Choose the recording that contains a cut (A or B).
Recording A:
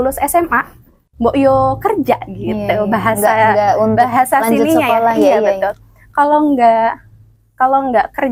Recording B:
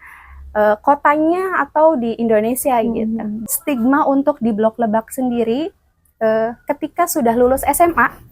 B